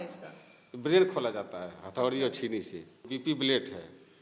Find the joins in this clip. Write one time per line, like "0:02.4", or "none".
0:03.1